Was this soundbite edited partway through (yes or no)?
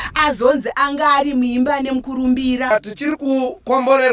yes